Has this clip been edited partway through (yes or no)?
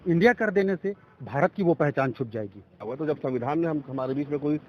yes